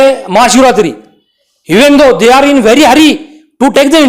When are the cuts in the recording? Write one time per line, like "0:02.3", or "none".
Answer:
none